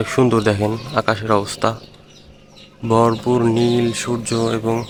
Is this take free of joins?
yes; 0 cuts

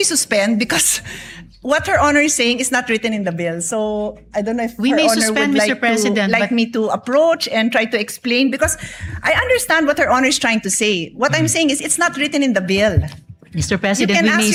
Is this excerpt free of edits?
yes; 0 cuts

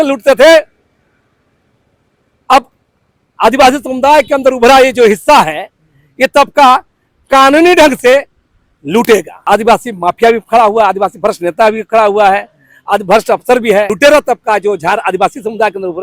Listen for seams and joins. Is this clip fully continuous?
no; 2 cuts; at 9.3 s, 13.9 s

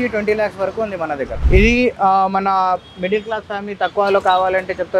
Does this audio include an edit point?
yes; 1 cut; at 1.3 s

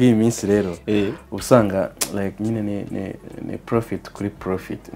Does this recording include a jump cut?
no; 0 cuts

